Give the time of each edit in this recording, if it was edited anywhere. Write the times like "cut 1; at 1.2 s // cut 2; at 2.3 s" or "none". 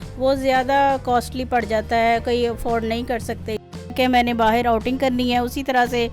cut 1; at 3.9 s